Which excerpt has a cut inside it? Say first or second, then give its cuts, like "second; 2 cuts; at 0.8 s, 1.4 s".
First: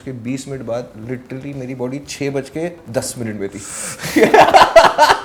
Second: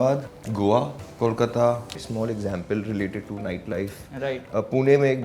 second; 2 cuts; at 0.9 s, 2.0 s